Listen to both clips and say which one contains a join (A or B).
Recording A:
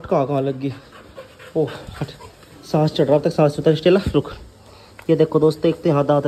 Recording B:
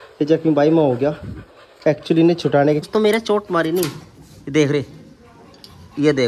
B